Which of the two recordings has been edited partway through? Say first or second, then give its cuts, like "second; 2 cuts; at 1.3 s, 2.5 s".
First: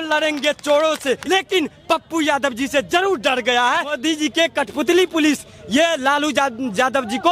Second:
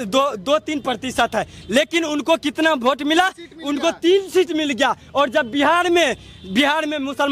first; 2 cuts; at 1.2 s, 4.0 s